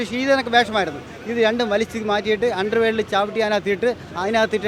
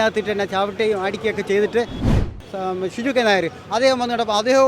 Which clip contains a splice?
second; 1 cut; at 2.2 s

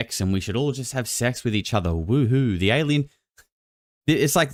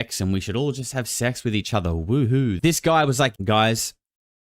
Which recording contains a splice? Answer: second; 2 cuts; at 2.6 s, 3.4 s

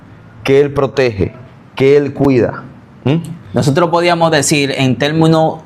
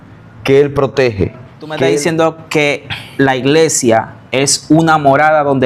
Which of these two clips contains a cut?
second; 1 cut; at 1.9 s

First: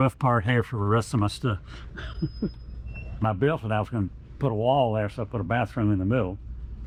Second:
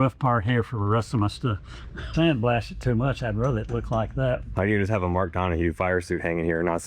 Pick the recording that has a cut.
second; 2 cuts; at 2.1 s, 4.5 s

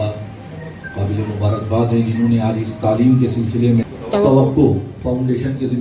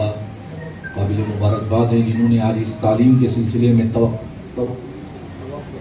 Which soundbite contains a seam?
first; 1 cut; at 3.9 s

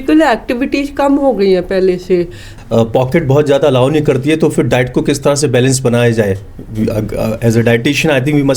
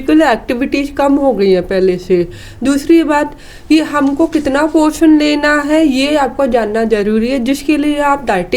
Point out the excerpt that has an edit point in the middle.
first; 1 cut; at 2.5 s

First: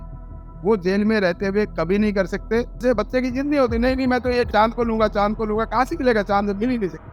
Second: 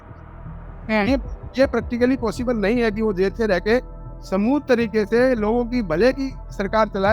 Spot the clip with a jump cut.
first; 2 cuts; at 2.8 s, 4.5 s

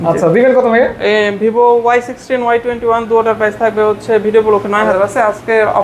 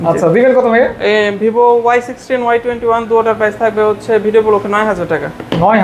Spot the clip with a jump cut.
first; 1 cut; at 4.9 s

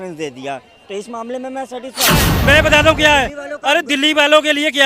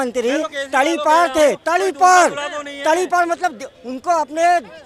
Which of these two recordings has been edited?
first; 1 cut; at 2.3 s

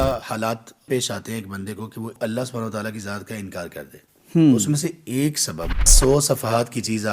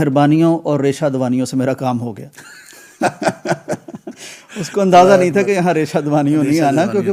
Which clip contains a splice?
first; 3 cuts; at 0.9 s, 2.1 s, 5.9 s

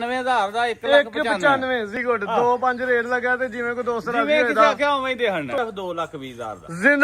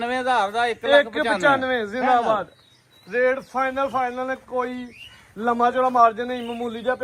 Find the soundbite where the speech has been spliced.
first; 2 cuts; at 2.0 s, 5.6 s

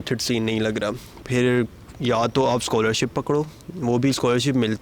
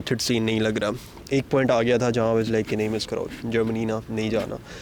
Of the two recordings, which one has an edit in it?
second; 1 cut; at 1.1 s

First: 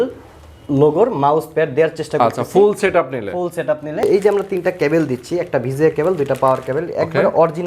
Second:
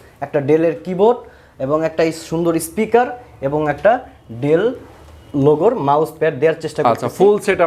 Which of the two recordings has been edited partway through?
first; 1 cut; at 4.0 s

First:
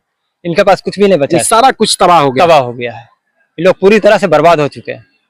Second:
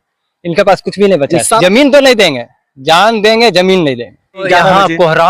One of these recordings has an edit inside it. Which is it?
second; 2 cuts; at 1.6 s, 4.5 s

